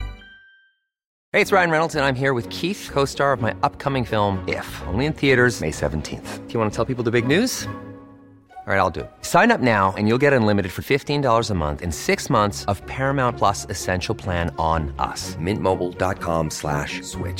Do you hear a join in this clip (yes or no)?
yes